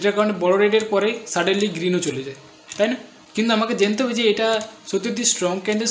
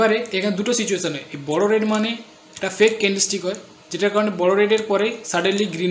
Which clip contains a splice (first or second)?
first